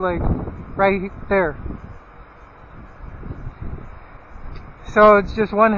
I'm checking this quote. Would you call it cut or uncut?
uncut